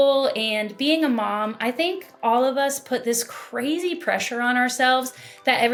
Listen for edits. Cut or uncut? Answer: uncut